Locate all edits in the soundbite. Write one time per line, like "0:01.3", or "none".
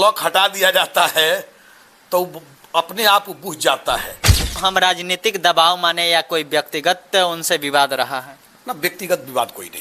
0:04.5